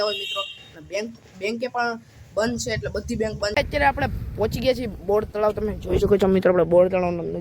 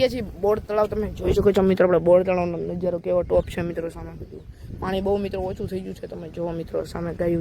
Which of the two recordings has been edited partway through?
first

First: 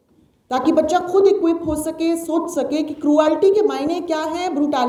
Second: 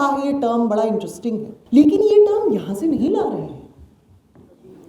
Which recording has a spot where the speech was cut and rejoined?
second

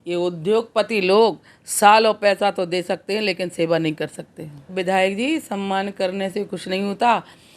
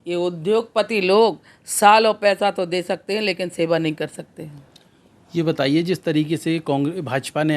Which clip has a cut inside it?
first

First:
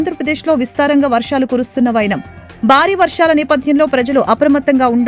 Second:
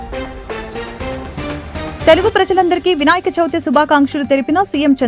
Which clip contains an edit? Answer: second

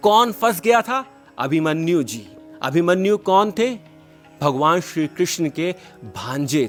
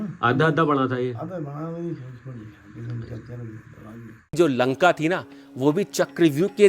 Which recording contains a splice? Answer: second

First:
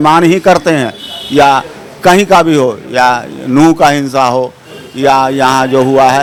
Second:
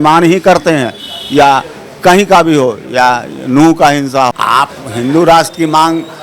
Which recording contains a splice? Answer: second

